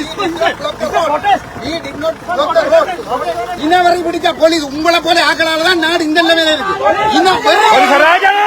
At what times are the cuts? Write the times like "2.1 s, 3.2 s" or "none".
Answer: 3.5 s